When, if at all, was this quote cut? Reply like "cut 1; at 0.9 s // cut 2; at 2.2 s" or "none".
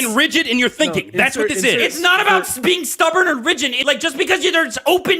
cut 1; at 3.8 s